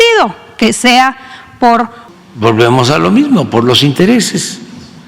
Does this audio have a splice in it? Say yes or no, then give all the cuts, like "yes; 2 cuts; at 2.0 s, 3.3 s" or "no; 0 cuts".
yes; 1 cut; at 2.0 s